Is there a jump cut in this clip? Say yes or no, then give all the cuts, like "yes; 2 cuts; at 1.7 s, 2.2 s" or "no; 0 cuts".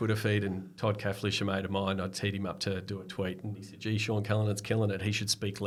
no; 0 cuts